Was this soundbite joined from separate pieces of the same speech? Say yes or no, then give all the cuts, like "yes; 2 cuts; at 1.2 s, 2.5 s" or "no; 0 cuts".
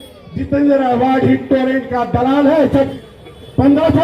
yes; 1 cut; at 2.9 s